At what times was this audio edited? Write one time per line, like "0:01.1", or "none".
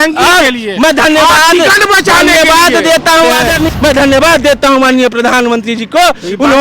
0:03.5

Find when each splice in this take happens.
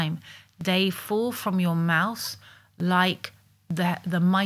none

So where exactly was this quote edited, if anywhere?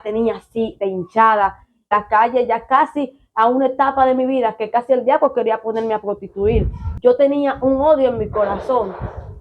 0:01.9
0:06.9

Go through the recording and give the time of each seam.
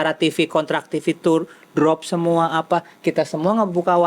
none

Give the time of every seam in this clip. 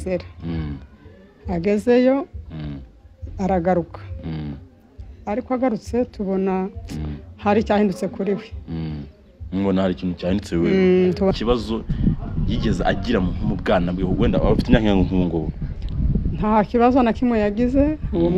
0:11.3

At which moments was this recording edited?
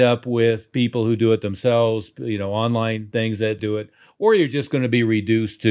0:03.5

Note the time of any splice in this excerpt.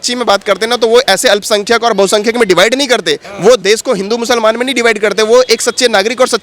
0:03.2

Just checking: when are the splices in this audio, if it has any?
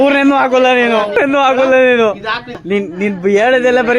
0:01.2

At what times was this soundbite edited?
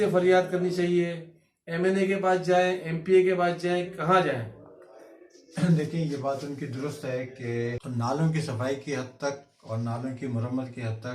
0:07.8

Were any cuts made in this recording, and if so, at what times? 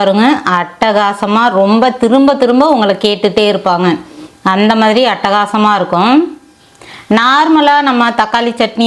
none

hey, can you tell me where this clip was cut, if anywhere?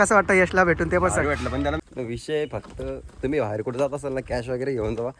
0:01.8

